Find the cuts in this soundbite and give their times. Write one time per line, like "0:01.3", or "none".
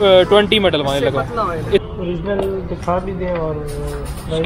0:01.8